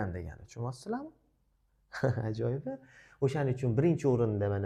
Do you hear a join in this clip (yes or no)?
no